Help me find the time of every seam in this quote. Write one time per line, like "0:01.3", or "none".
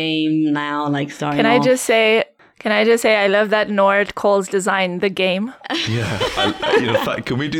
0:01.4

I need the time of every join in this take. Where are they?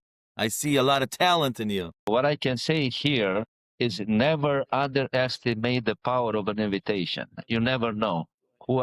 0:02.1

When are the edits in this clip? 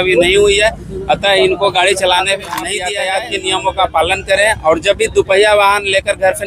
0:02.8

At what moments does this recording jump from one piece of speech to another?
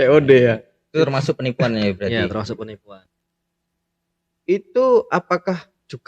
0:03.0

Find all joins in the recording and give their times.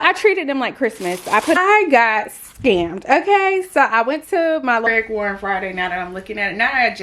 0:01.6
0:04.8

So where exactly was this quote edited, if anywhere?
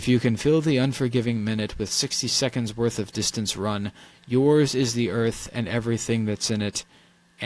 none

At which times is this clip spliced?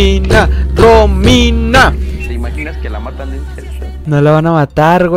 0:03.9

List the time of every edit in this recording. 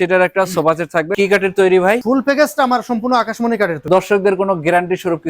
0:01.1
0:02.0
0:03.9

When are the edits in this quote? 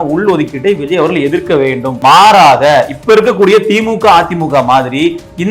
0:01.9

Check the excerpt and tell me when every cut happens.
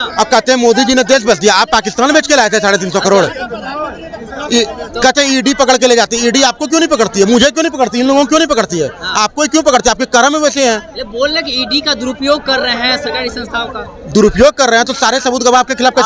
none

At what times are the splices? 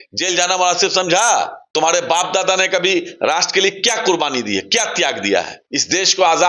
0:01.6
0:05.6

